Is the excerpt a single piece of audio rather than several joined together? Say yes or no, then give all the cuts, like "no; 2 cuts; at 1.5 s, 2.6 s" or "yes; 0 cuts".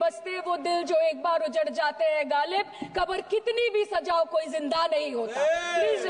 yes; 0 cuts